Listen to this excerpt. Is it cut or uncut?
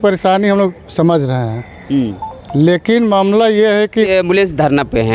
cut